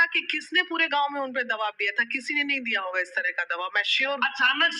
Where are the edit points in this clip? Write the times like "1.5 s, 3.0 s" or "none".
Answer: none

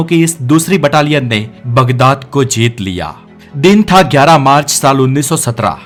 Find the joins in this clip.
none

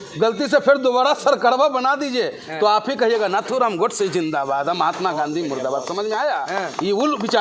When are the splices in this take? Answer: none

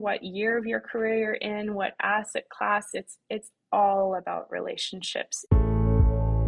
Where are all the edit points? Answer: 5.4 s

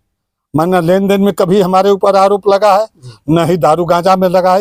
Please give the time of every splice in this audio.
none

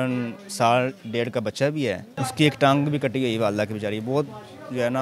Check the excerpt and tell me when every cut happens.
2.1 s

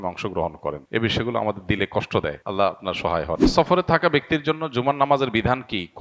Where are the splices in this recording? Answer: 0.8 s, 2.4 s, 3.5 s

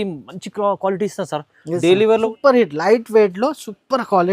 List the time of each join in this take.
2.3 s

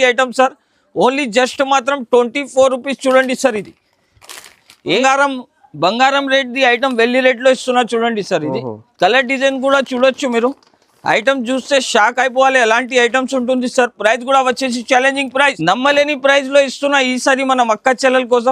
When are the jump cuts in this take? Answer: 4.9 s, 15.6 s

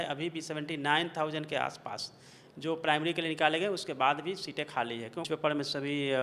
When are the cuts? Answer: 5.2 s

